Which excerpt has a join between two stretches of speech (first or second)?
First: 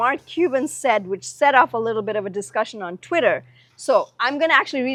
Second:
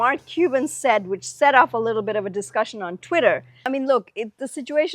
second